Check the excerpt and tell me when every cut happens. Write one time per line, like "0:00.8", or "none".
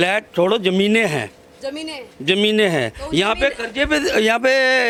none